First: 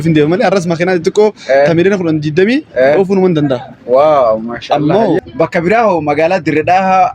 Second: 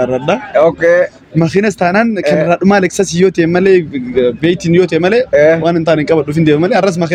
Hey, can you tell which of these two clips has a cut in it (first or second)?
first